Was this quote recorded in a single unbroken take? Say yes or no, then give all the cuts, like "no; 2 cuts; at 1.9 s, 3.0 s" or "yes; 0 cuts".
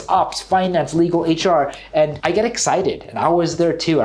yes; 0 cuts